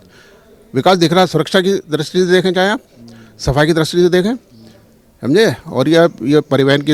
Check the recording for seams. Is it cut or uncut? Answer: uncut